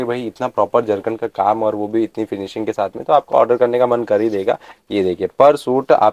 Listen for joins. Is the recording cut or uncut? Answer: uncut